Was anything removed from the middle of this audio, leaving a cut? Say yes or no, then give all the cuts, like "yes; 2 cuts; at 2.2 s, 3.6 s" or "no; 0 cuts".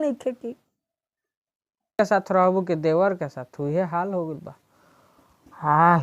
yes; 1 cut; at 2.0 s